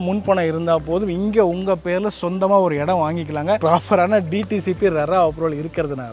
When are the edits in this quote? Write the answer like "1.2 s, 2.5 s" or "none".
3.6 s